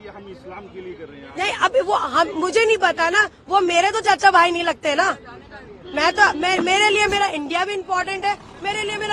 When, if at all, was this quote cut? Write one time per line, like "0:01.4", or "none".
none